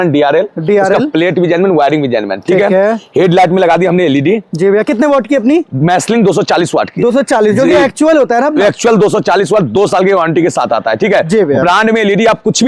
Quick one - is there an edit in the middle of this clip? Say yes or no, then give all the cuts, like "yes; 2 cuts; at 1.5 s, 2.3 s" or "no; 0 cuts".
no; 0 cuts